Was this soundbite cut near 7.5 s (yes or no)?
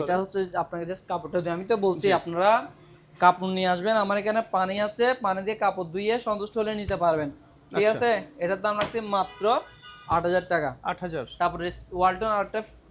no